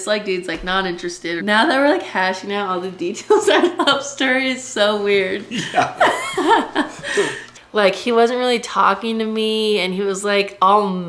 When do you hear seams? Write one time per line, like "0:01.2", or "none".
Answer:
0:01.4
0:07.5